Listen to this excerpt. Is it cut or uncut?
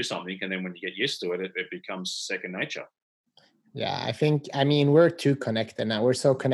uncut